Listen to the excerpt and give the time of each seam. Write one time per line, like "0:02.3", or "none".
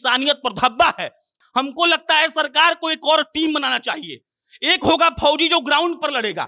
0:01.4

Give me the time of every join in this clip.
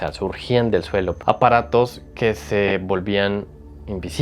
0:01.2

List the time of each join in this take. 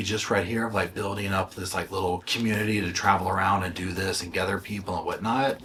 none

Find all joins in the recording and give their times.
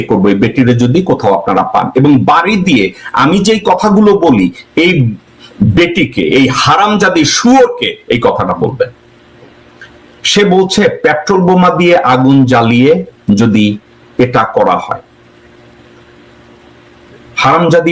none

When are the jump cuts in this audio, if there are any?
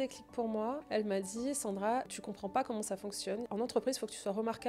0:00.8
0:02.2
0:03.5

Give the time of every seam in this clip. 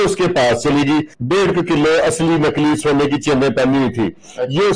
0:01.2

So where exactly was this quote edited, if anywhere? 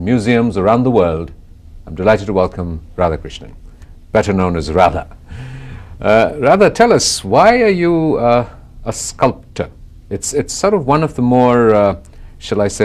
none

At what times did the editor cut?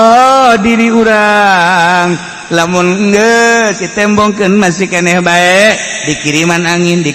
none

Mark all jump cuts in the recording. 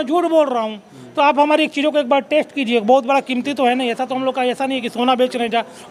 none

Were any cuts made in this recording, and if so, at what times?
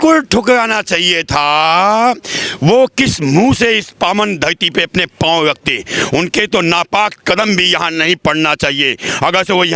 none

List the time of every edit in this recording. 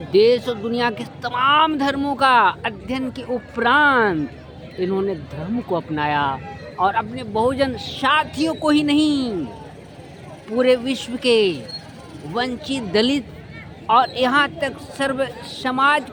none

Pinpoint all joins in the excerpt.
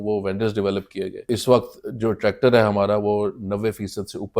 0:01.2

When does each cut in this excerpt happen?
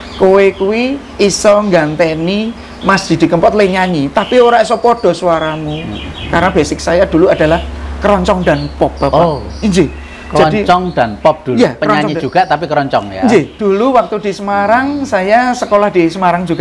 none

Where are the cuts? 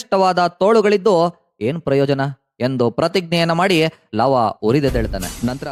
none

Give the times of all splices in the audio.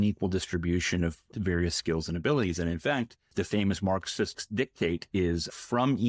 0:03.3
0:04.4

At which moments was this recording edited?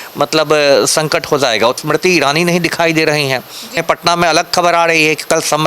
0:01.8
0:03.8

